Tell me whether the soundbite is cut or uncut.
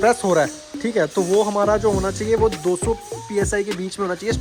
uncut